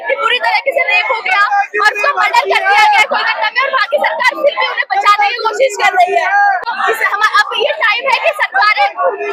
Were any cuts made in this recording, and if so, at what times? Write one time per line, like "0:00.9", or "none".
none